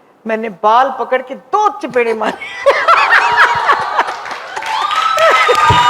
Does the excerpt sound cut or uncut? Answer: uncut